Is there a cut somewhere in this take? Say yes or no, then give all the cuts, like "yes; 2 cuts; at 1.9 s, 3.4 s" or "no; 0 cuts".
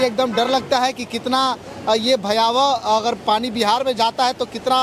no; 0 cuts